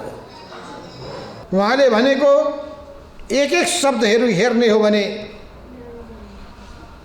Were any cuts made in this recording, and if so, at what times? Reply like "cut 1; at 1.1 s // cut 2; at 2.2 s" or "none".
cut 1; at 1.4 s